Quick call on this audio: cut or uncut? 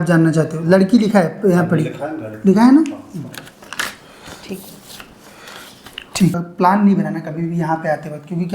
cut